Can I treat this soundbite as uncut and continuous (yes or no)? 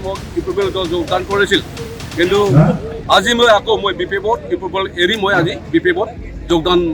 yes